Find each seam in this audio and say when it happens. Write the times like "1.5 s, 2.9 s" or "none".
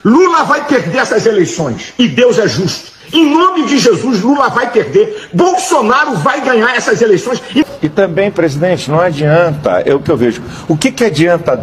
1.8 s, 7.6 s

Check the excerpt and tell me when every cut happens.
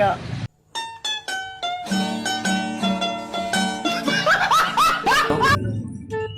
5.4 s

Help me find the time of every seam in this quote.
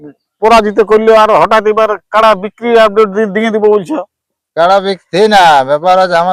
none

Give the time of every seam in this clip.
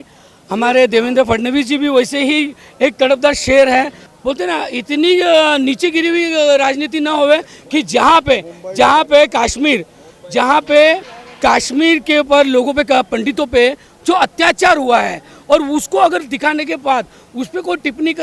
4.0 s

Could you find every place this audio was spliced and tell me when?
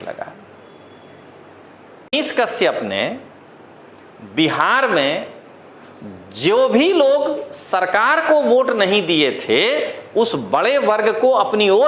2.1 s

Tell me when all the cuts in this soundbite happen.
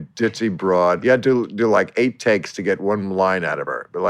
1.0 s

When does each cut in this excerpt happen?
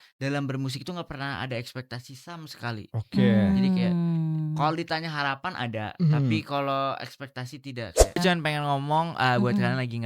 8.2 s

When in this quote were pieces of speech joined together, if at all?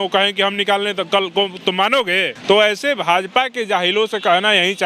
2.3 s

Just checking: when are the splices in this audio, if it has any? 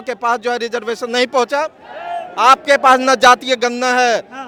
none

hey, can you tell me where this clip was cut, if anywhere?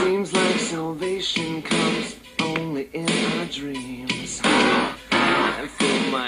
none

